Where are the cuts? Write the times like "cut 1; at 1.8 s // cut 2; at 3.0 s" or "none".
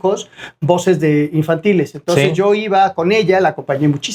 none